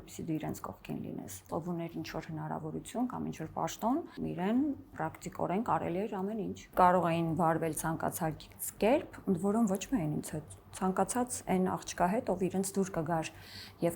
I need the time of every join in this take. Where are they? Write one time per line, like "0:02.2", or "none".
0:01.5
0:04.1
0:04.9
0:06.6